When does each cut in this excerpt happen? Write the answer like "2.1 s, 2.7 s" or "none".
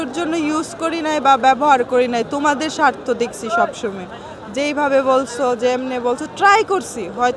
none